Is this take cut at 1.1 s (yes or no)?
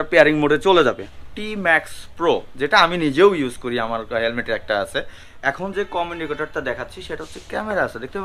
yes